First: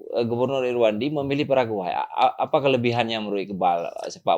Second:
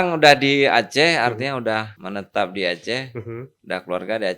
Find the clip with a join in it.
second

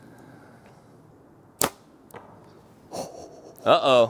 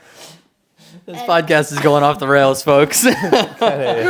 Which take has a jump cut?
first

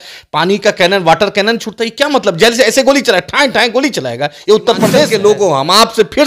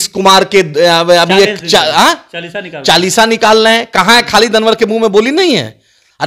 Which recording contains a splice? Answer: first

